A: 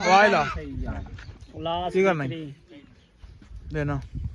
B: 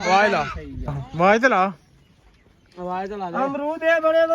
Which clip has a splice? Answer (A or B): B